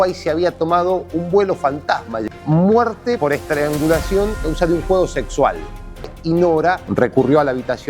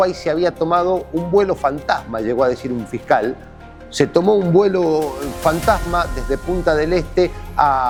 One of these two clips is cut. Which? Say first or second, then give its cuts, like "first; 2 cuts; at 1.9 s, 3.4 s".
first; 2 cuts; at 2.2 s, 6.1 s